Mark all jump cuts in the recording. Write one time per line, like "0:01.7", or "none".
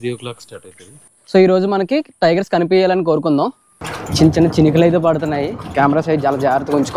none